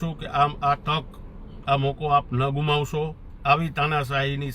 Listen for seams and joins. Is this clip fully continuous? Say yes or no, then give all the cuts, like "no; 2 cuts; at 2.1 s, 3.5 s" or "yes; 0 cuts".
no; 1 cut; at 3.3 s